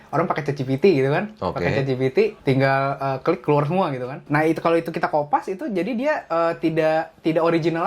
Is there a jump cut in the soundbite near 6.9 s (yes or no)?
no